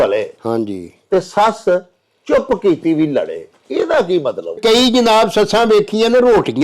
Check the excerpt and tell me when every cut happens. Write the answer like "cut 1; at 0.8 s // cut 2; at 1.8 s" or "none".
cut 1; at 4.6 s